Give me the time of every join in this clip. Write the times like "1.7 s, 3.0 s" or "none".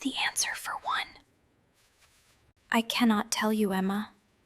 2.4 s